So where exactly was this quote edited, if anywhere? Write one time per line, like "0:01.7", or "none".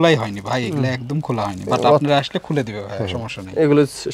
none